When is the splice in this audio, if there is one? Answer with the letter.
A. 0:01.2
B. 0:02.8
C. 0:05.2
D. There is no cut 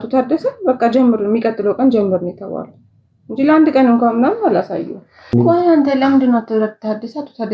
C